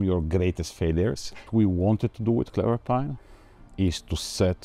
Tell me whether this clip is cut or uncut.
cut